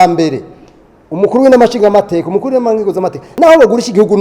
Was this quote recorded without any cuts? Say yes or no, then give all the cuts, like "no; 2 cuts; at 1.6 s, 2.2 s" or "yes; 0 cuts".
no; 1 cut; at 3.2 s